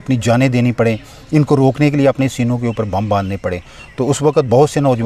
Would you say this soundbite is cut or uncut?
uncut